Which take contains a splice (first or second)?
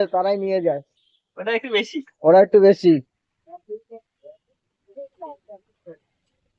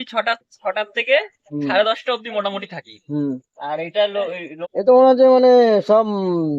second